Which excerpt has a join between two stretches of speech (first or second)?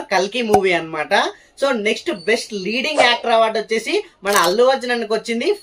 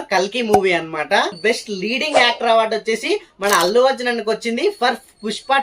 second